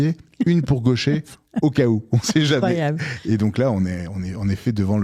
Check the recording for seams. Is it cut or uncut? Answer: uncut